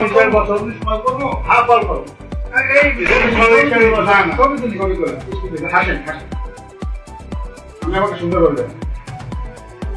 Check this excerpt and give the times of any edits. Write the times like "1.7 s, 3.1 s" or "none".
none